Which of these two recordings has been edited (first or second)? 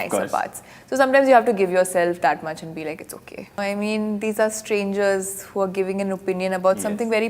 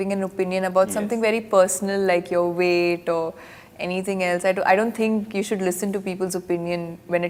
first